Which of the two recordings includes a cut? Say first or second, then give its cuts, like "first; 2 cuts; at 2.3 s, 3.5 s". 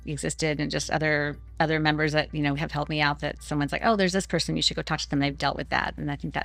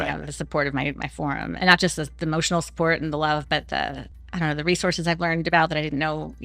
second; 2 cuts; at 1.5 s, 4.1 s